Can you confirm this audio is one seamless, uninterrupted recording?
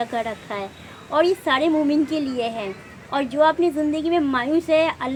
yes; 0 cuts

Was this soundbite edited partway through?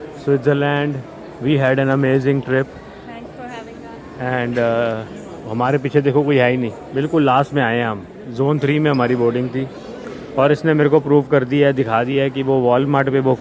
no; 0 cuts

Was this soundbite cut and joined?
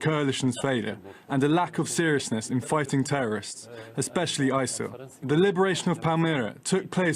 yes; 1 cut; at 2.4 s

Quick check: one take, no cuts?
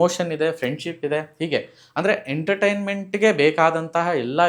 yes; 0 cuts

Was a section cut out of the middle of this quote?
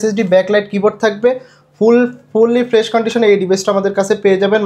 no; 0 cuts

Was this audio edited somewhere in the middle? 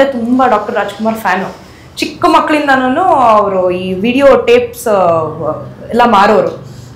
no; 0 cuts

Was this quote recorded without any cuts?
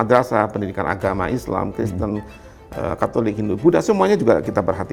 yes; 0 cuts

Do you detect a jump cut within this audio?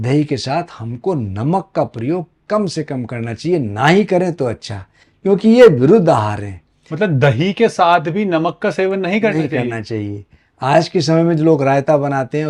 no; 0 cuts

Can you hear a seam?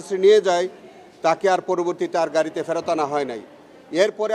no; 0 cuts

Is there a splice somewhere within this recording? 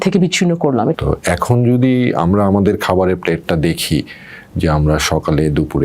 yes; 1 cut; at 0.9 s

